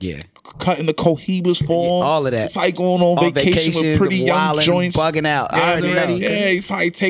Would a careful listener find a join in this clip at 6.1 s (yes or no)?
yes